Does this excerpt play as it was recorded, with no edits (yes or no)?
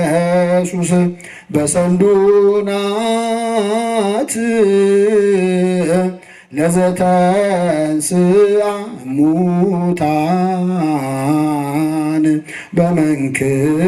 yes